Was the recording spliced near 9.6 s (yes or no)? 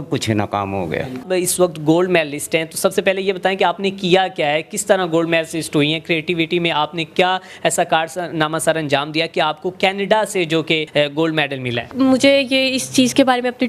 no